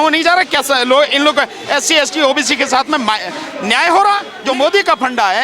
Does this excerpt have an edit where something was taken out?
yes; 1 cut; at 4.3 s

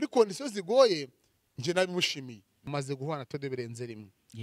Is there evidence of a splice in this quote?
yes; 1 cut; at 2.5 s

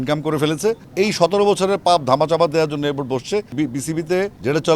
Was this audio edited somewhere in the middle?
yes; 2 cuts; at 0.8 s, 3.5 s

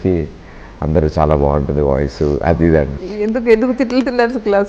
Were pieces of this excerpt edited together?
yes; 1 cut; at 3.0 s

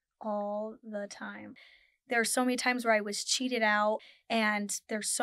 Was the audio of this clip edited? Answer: yes; 2 cuts; at 1.5 s, 4.0 s

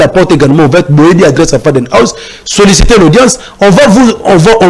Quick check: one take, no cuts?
yes; 0 cuts

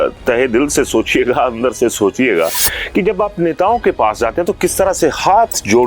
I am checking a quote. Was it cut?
no; 0 cuts

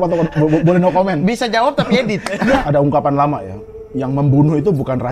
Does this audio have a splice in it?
yes; 1 cut; at 2.6 s

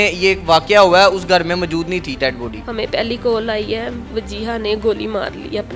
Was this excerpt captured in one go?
no; 1 cut; at 2.6 s

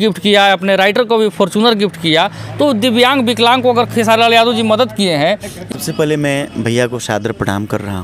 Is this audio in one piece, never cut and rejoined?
no; 1 cut; at 5.6 s

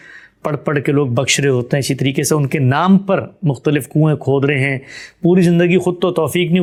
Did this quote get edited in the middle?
no; 0 cuts

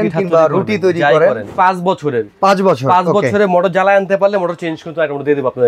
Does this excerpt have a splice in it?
yes; 1 cut; at 1.4 s

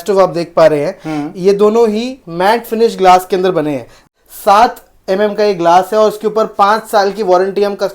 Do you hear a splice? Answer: yes; 1 cut; at 4.1 s

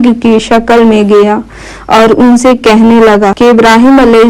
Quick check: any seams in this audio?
yes; 1 cut; at 3.3 s

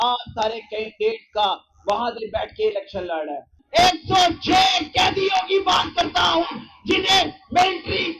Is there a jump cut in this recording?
yes; 1 cut; at 3.6 s

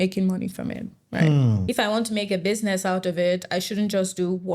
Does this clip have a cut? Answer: yes; 1 cut; at 1.6 s

